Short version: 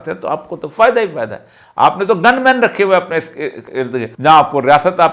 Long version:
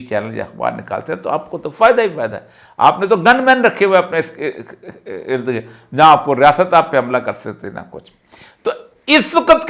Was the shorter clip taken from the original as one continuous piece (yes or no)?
no